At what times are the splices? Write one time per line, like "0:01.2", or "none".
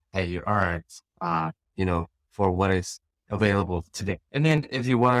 0:04.2